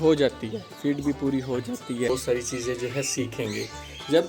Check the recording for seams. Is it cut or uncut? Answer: cut